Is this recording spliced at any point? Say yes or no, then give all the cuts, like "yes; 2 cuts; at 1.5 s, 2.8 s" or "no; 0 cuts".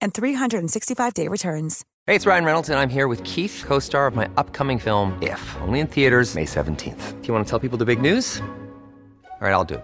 yes; 1 cut; at 1.8 s